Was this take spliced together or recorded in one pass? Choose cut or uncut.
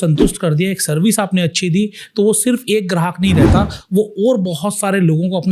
uncut